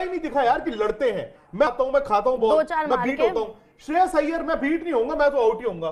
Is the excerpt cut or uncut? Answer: uncut